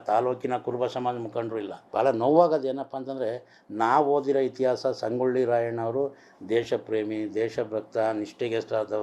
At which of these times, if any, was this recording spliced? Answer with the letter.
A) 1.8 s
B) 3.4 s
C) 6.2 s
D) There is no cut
A